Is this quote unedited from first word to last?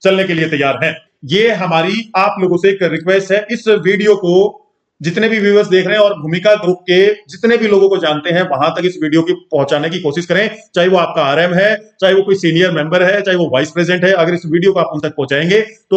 no; 1 cut; at 1.1 s

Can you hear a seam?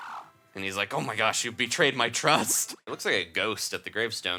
yes; 1 cut; at 2.9 s

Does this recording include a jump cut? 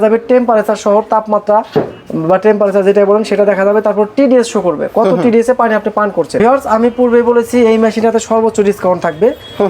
no; 0 cuts

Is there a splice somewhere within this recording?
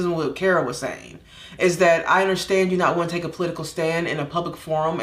no; 0 cuts

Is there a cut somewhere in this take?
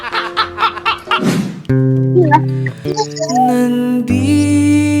yes; 1 cut; at 1.3 s

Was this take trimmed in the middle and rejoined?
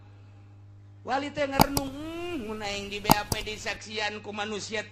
no; 0 cuts

